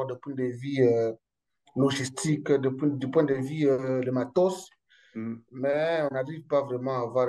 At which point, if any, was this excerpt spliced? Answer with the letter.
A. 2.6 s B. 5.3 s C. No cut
C